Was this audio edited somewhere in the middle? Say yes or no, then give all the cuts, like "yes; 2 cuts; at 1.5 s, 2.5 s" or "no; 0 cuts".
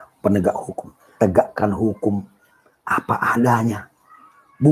yes; 1 cut; at 1.1 s